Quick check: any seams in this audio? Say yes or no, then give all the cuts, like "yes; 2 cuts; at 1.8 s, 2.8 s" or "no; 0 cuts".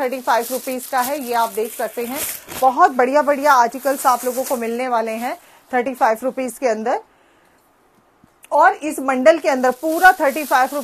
no; 0 cuts